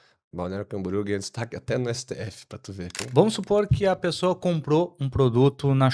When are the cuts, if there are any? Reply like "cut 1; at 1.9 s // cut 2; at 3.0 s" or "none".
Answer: cut 1; at 2.9 s